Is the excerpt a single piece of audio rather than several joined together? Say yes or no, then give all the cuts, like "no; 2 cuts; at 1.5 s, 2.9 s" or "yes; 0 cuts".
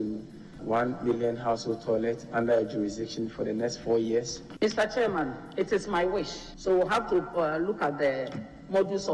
yes; 0 cuts